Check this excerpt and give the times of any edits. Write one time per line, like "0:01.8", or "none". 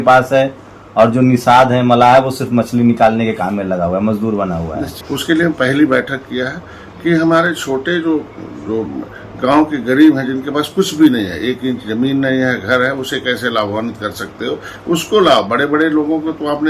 0:04.9

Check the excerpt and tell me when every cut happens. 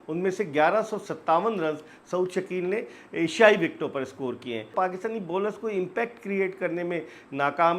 0:04.7

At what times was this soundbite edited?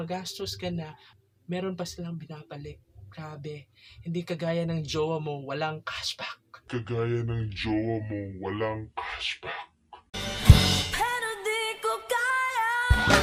none

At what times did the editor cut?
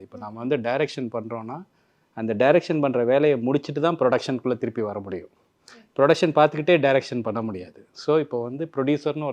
none

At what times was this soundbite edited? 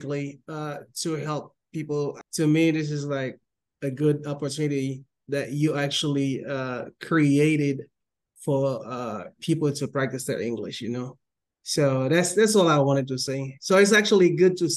0:02.2

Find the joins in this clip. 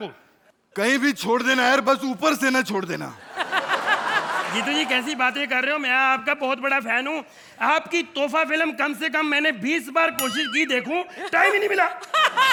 none

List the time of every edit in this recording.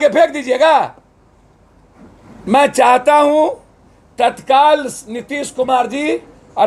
0:02.4

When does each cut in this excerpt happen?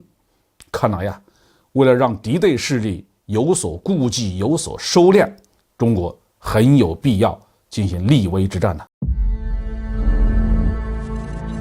0:08.9

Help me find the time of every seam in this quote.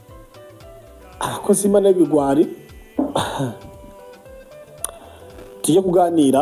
0:02.9

